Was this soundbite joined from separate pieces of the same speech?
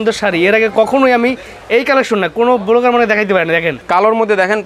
no; 0 cuts

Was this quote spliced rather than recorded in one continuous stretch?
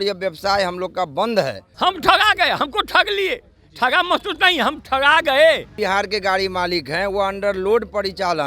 yes; 2 cuts; at 1.6 s, 5.7 s

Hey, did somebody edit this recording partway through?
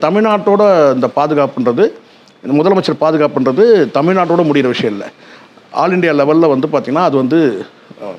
no; 0 cuts

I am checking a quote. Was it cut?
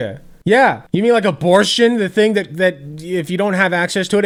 no; 0 cuts

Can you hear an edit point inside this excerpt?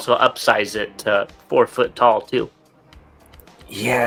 no; 0 cuts

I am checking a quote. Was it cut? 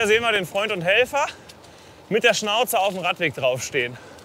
no; 0 cuts

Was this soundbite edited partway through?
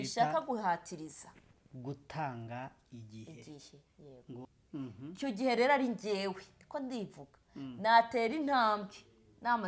yes; 1 cut; at 4.4 s

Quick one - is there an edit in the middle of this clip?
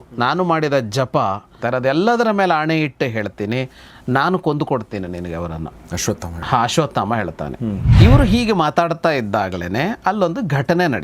yes; 2 cuts; at 1.5 s, 7.9 s

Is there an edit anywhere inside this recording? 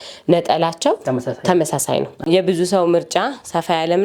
yes; 1 cut; at 2.3 s

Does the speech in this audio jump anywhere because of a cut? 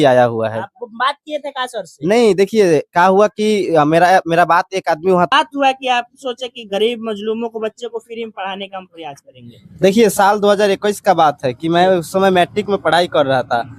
yes; 1 cut; at 5.3 s

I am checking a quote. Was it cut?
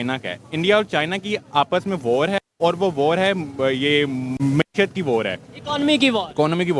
yes; 1 cut; at 4.3 s

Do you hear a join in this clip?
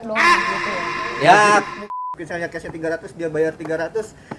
yes; 1 cut; at 1.8 s

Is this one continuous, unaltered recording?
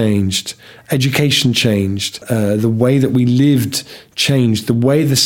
no; 1 cut; at 2.2 s

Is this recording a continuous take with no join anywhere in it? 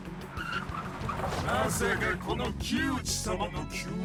yes; 0 cuts

